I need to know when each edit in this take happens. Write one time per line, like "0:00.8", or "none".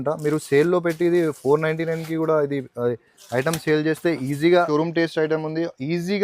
0:04.7